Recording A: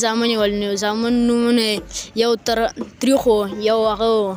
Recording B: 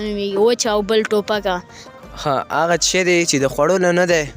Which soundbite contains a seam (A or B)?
B